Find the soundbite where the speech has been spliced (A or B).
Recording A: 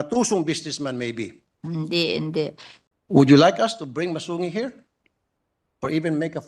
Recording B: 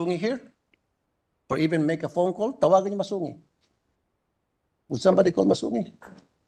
A